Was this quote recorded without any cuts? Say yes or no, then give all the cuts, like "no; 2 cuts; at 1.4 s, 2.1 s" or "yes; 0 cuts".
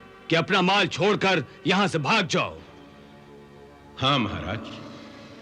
yes; 0 cuts